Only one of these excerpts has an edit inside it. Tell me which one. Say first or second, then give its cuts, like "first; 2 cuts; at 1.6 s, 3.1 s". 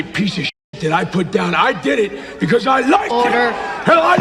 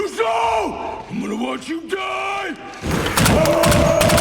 second; 2 cuts; at 1.0 s, 3.2 s